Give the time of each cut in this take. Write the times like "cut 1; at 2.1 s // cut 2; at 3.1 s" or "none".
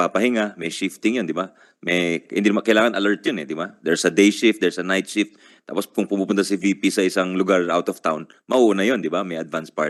none